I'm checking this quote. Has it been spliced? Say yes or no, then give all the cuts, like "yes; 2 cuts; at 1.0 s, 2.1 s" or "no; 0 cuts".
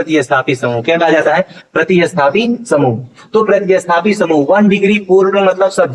no; 0 cuts